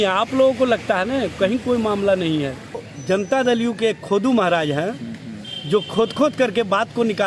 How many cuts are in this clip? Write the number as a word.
one